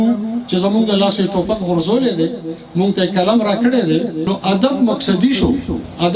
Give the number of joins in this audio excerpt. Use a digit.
1